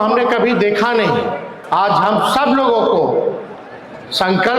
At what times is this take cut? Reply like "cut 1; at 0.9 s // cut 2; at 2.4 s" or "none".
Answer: cut 1; at 1.5 s